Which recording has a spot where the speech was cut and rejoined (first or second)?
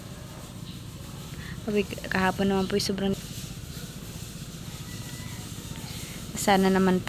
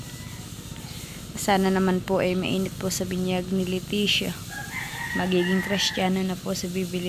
first